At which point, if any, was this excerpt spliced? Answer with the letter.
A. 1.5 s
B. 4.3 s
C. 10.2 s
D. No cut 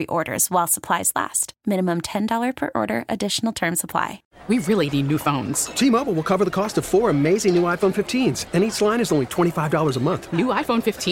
B